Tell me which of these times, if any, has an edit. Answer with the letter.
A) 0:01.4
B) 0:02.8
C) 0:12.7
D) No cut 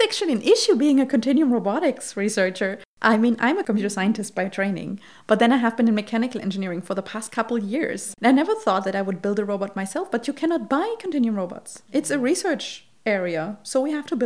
D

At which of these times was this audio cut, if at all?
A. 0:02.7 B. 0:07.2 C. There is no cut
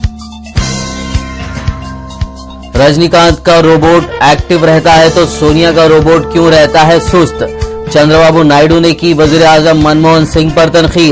C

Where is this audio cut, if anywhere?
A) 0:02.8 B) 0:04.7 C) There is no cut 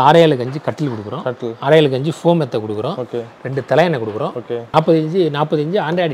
B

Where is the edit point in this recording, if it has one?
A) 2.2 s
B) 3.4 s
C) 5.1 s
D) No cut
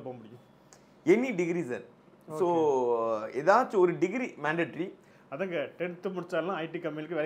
C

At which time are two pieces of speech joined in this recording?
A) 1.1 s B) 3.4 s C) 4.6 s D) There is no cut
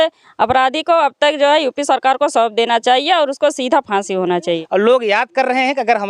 C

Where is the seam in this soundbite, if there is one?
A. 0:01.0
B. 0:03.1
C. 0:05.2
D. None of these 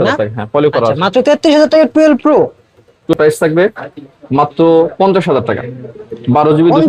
B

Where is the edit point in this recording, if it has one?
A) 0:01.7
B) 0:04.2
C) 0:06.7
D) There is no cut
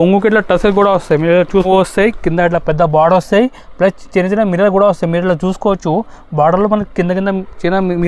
A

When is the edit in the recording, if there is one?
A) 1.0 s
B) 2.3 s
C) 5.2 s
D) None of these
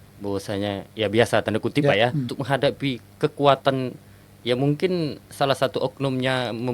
B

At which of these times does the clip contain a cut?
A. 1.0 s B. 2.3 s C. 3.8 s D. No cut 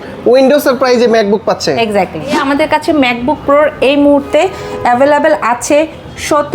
B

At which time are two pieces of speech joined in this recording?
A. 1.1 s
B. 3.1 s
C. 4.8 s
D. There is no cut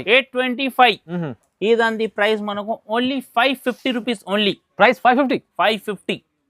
A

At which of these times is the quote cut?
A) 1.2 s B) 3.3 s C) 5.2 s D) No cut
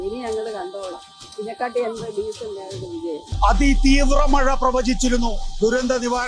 B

